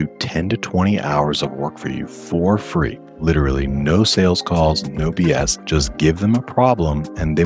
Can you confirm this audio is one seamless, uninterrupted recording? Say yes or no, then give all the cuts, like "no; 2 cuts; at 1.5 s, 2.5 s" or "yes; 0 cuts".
no; 2 cuts; at 3.0 s, 5.6 s